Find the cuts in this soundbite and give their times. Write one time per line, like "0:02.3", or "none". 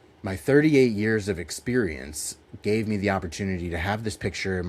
none